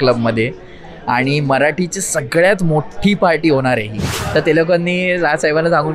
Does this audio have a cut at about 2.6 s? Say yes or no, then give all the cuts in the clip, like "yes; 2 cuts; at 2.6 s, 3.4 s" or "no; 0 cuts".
no; 1 cut; at 4.1 s